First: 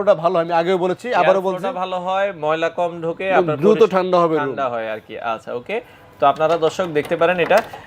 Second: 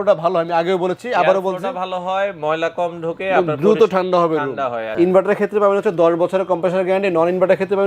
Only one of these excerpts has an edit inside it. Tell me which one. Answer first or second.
second